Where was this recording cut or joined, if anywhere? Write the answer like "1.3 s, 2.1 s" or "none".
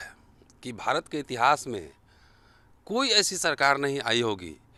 none